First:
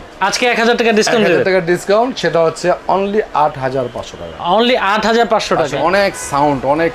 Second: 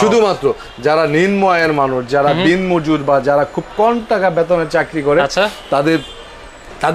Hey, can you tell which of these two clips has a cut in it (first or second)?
first